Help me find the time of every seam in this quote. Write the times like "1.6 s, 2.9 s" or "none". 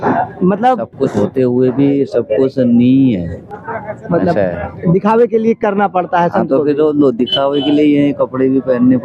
none